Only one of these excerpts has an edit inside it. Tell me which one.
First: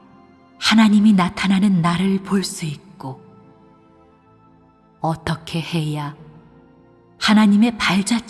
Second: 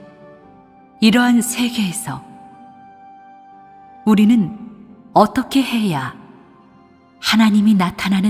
second; 1 cut; at 1.4 s

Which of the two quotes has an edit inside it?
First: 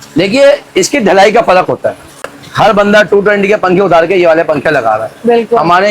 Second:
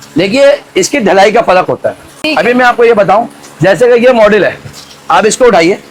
first; 1 cut; at 2.3 s

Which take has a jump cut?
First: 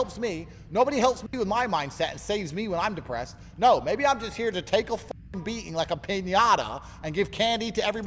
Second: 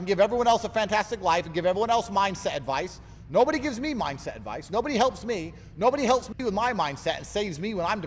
second; 1 cut; at 4.1 s

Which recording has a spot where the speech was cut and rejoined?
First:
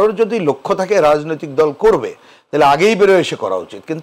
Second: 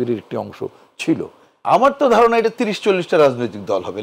second; 1 cut; at 1.4 s

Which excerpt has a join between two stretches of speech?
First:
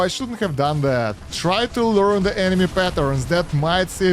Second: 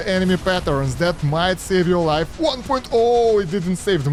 first; 1 cut; at 1.2 s

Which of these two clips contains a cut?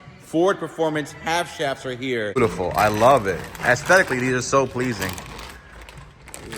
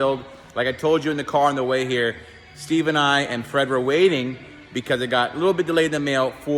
first; 1 cut; at 2.4 s

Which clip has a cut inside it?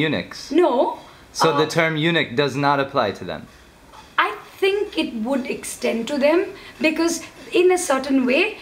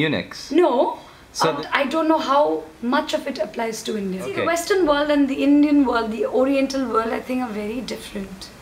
second; 2 cuts; at 1.5 s, 4.3 s

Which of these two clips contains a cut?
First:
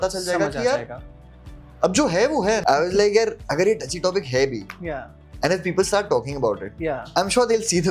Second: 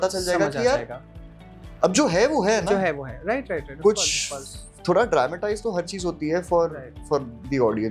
first; 1 cut; at 2.6 s

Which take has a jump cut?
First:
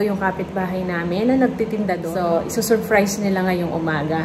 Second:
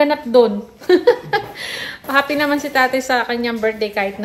first; 1 cut; at 2.0 s

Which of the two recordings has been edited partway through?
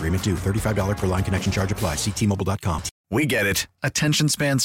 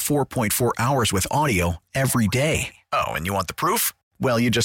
first; 1 cut; at 2.9 s

